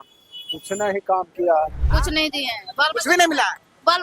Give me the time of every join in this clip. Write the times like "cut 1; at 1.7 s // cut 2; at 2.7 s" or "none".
cut 1; at 1.8 s